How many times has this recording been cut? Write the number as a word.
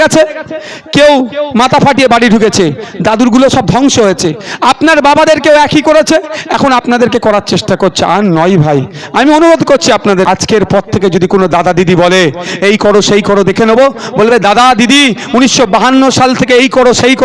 one